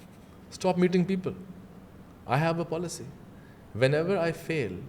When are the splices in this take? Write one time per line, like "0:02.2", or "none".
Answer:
none